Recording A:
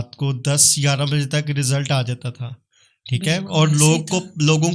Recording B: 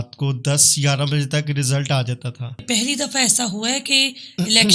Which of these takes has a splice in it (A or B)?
B